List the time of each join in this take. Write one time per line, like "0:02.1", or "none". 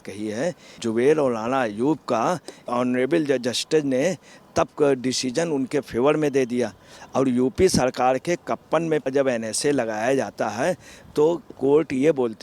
0:00.8
0:02.7
0:09.1